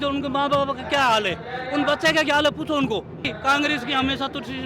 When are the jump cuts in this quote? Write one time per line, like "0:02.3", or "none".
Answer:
0:03.3

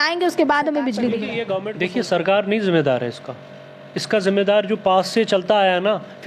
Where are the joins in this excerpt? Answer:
0:01.6

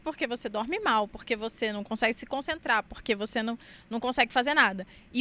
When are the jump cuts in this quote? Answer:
none

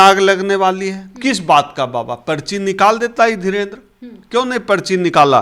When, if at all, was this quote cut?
none

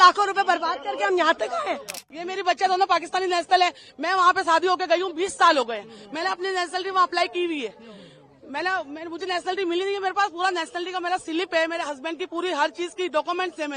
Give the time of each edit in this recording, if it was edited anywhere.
0:02.1

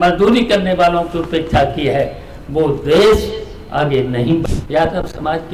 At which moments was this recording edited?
0:04.4

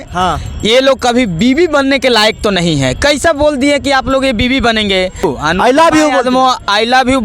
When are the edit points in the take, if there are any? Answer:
0:05.2

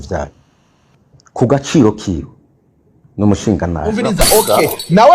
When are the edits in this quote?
0:03.9

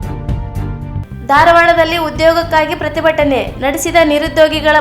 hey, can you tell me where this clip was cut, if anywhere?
0:01.1

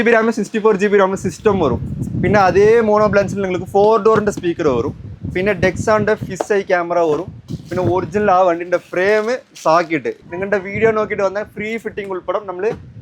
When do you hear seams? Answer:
0:10.2

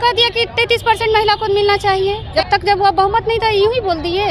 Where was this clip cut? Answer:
0:02.2

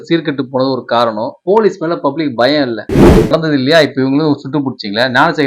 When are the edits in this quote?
0:01.3
0:03.3

